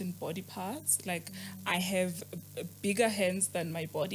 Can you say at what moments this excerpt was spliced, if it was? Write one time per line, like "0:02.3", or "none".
none